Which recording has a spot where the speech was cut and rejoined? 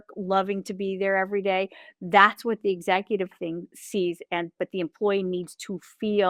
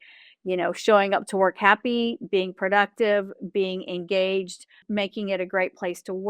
second; 1 cut; at 4.8 s

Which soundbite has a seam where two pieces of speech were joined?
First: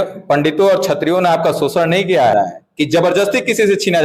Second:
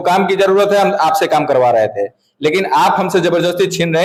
first; 1 cut; at 2.3 s

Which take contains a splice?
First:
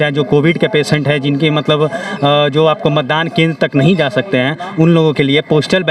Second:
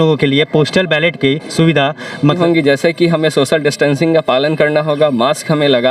second; 1 cut; at 2.4 s

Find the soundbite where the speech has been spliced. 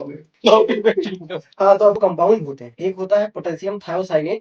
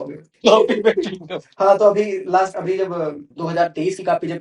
first; 1 cut; at 2.0 s

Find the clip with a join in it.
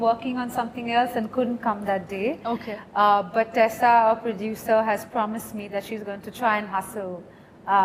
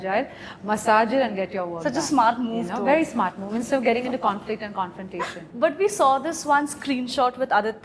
second; 1 cut; at 5.4 s

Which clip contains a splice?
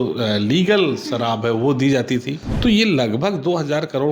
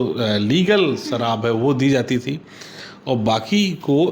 first; 1 cut; at 2.4 s

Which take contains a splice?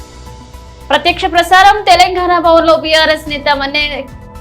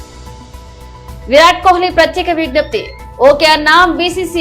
first; 1 cut; at 0.9 s

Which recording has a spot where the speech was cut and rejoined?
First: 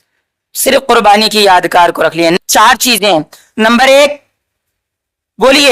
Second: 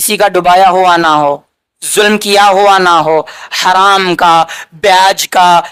first; 1 cut; at 2.4 s

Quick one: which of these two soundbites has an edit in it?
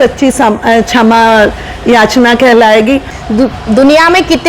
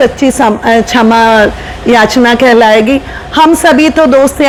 first; 1 cut; at 3.1 s

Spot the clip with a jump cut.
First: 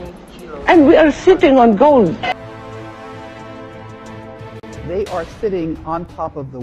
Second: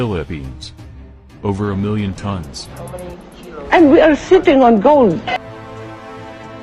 first; 1 cut; at 4.8 s

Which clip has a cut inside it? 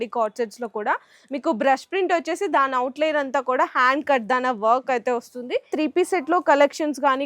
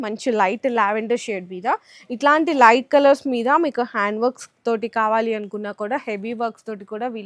first; 1 cut; at 5.7 s

